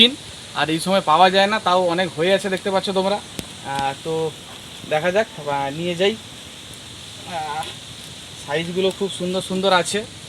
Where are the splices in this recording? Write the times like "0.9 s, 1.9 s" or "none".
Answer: none